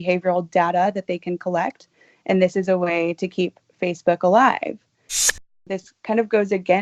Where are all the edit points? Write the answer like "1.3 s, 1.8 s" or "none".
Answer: 5.4 s